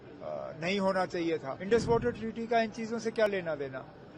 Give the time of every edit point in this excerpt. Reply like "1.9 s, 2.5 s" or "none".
1.5 s